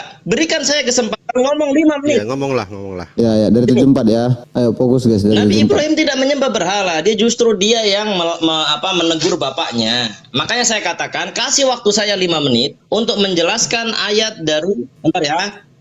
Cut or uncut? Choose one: cut